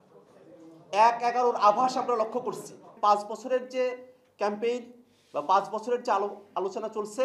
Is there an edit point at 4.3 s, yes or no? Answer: no